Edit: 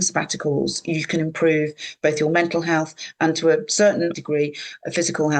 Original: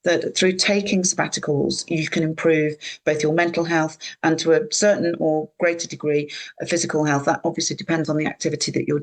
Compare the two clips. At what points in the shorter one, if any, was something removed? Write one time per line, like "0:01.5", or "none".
0:04.1